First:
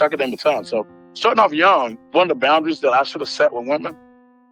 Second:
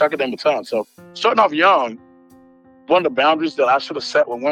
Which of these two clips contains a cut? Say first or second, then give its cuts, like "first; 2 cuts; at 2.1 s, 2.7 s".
first; 1 cut; at 2.0 s